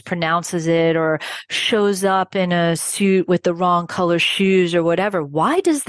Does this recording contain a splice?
no; 0 cuts

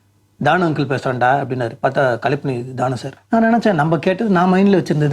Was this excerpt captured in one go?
no; 1 cut; at 3.1 s

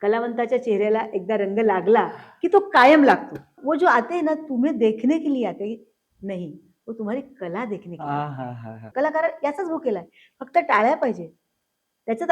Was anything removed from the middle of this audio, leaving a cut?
yes; 2 cuts; at 3.5 s, 8.9 s

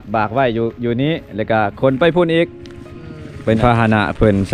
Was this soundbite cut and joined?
yes; 1 cut; at 3.6 s

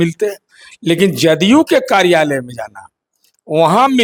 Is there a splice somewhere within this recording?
no; 0 cuts

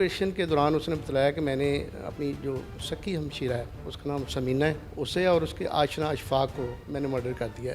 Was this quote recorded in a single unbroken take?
no; 3 cuts; at 3.8 s, 4.9 s, 6.8 s

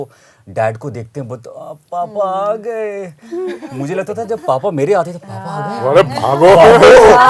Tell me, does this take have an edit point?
no; 0 cuts

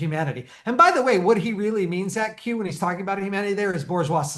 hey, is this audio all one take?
yes; 0 cuts

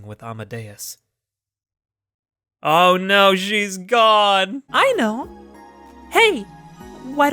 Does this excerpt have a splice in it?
yes; 1 cut; at 4.6 s

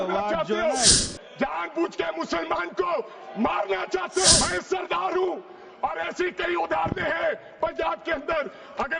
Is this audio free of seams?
no; 2 cuts; at 1.0 s, 4.4 s

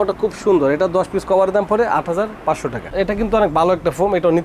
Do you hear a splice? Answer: yes; 1 cut; at 2.9 s

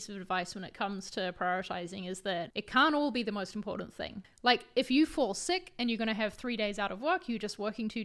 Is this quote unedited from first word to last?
no; 2 cuts; at 2.6 s, 4.2 s

